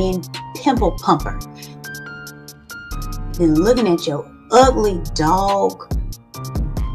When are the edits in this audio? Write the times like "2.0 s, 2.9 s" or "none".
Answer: 1.3 s, 3.3 s, 5.8 s